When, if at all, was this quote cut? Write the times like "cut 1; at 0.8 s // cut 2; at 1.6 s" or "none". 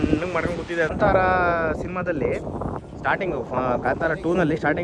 cut 1; at 0.9 s